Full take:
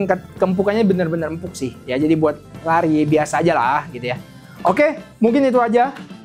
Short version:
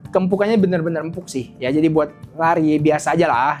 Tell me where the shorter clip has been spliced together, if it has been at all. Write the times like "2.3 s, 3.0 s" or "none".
none